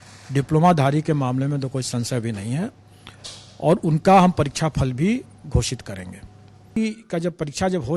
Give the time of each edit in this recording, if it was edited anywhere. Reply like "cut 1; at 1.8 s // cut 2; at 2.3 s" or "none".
cut 1; at 6.8 s